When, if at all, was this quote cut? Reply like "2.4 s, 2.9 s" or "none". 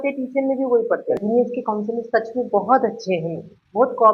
1.2 s